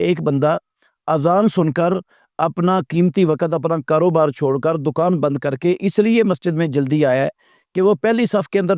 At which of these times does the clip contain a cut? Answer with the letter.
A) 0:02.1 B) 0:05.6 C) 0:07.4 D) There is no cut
D